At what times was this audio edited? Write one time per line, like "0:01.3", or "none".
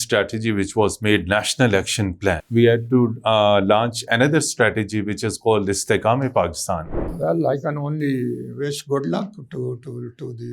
0:02.4
0:07.2